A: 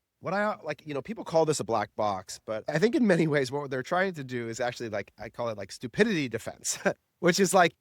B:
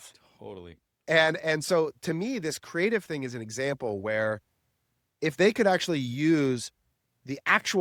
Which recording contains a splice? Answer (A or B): A